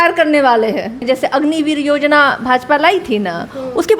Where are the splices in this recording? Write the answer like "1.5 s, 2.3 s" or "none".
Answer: 1.0 s